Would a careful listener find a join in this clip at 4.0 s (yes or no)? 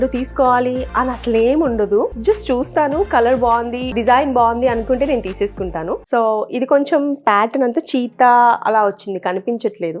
yes